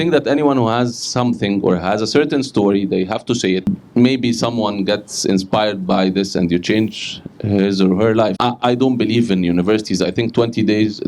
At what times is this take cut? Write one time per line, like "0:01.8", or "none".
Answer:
0:03.6
0:08.4